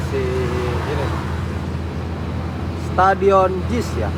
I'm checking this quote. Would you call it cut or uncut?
uncut